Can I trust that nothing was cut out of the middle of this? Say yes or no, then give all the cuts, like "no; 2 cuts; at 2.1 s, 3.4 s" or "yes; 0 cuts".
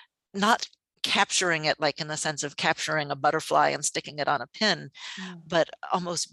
yes; 0 cuts